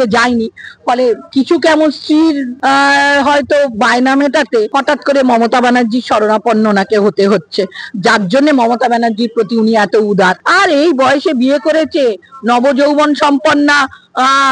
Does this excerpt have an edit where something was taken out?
yes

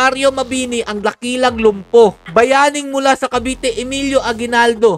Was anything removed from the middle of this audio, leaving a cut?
yes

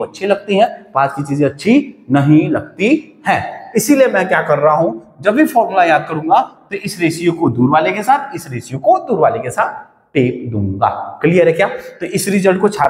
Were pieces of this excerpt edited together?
no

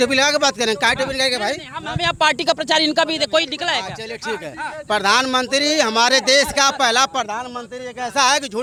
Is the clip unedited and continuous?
yes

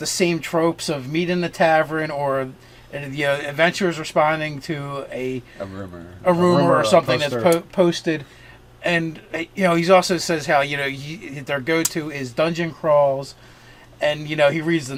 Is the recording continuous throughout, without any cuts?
yes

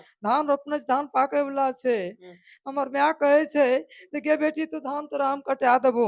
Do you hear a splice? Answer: no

